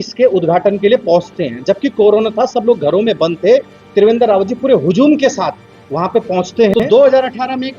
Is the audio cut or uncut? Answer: cut